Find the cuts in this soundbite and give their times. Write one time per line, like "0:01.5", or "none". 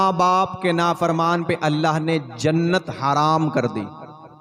none